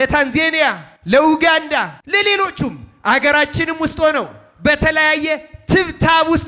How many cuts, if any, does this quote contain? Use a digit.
2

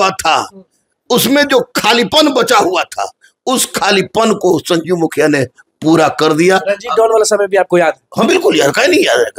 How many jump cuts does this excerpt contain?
0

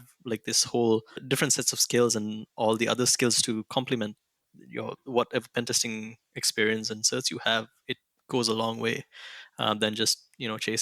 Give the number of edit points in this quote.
1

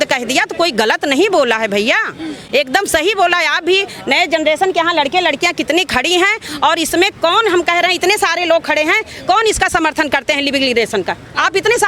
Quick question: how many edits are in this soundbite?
0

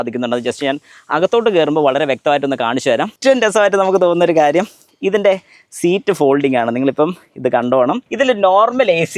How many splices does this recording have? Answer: 2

